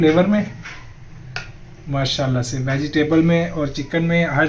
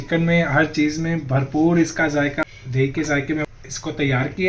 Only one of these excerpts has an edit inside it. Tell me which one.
second; 2 cuts; at 2.4 s, 3.5 s

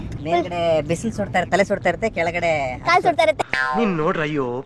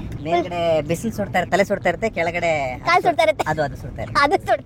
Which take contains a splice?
first; 1 cut; at 3.5 s

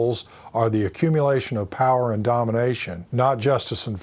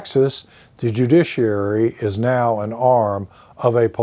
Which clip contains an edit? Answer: first; 1 cut; at 3.0 s

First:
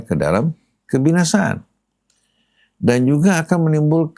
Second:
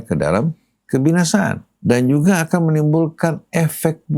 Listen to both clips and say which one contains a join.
second; 1 cut; at 1.7 s

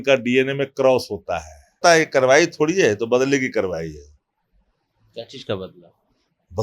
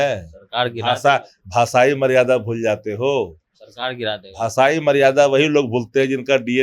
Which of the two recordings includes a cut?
first; 1 cut; at 1.8 s

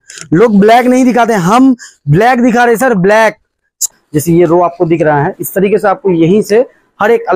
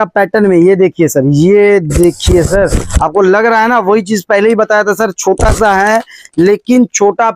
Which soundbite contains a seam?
first; 1 cut; at 3.8 s

